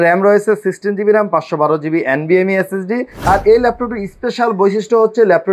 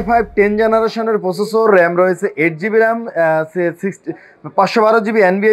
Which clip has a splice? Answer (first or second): first